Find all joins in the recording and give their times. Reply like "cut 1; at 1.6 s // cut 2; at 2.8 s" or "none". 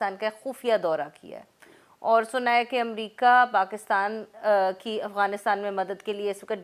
none